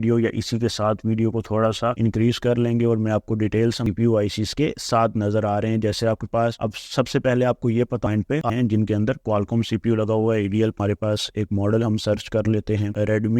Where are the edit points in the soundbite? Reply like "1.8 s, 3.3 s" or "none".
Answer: 3.8 s, 8.3 s, 10.8 s

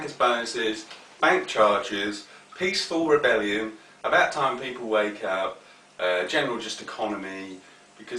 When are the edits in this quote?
5.9 s

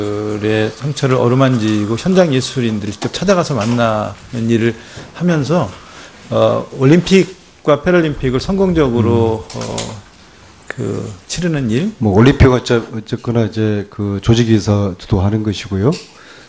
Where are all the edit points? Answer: none

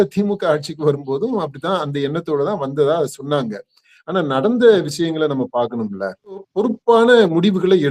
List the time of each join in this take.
6.5 s

